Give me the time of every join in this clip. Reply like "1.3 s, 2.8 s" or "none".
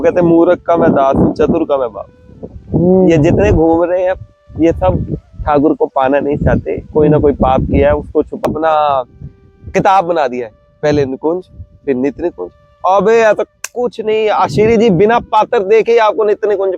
8.4 s